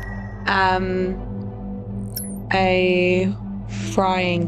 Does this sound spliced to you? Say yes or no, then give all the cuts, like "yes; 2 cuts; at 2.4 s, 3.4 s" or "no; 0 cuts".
yes; 1 cut; at 1.1 s